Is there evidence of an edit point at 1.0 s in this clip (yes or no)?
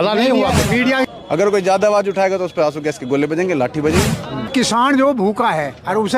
yes